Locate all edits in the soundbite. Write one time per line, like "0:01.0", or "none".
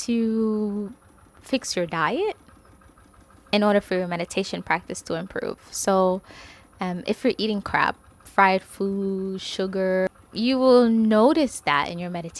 0:10.1